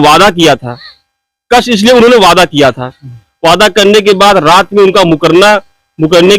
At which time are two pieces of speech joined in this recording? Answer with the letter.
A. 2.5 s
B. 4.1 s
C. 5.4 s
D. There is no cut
D